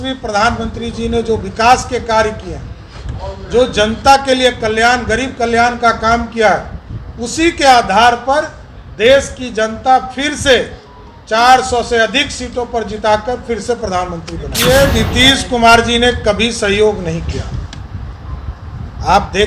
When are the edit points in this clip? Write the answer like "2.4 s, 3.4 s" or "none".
14.5 s